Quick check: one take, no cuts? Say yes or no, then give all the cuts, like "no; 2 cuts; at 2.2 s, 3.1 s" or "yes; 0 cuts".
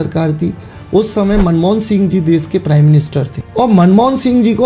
no; 1 cut; at 3.4 s